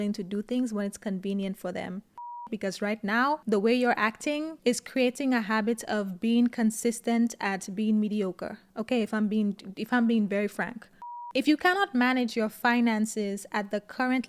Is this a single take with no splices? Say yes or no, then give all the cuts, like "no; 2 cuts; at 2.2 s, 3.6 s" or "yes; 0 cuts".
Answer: no; 2 cuts; at 2.5 s, 10.9 s